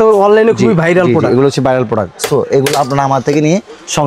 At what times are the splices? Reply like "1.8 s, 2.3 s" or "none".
none